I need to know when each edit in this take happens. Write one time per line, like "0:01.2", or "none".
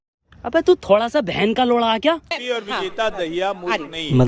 none

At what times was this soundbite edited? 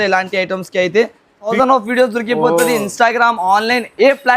0:01.5

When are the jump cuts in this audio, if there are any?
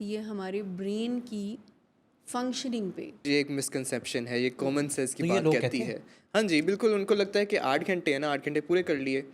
0:03.2

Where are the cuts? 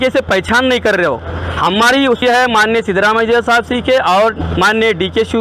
0:02.2

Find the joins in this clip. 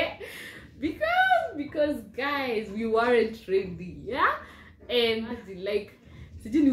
0:05.5

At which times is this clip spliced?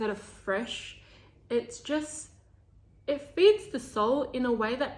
none

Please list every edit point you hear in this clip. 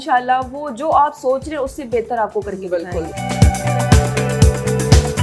0:03.1

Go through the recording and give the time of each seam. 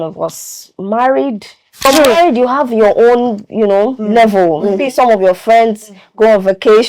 0:01.9

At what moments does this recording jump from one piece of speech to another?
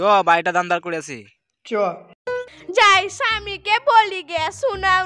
0:02.4

